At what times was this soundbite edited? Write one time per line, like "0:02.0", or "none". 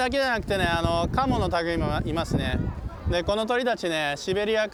none

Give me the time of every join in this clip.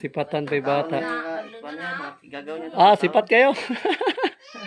none

